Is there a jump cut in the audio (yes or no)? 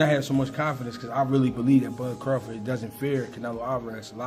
no